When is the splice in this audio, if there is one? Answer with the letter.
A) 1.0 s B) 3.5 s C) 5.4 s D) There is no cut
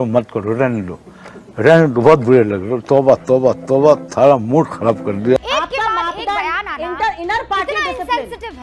C